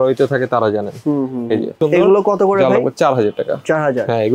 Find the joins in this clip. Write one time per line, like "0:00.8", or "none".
0:01.8